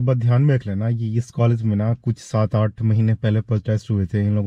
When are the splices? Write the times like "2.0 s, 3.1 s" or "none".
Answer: none